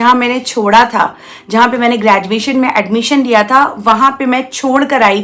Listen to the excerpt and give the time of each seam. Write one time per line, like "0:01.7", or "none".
none

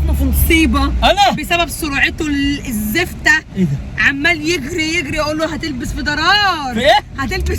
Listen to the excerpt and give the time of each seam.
none

